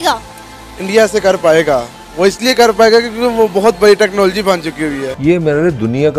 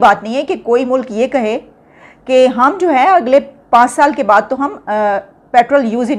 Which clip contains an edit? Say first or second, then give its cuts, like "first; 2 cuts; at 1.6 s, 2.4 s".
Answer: first; 1 cut; at 5.1 s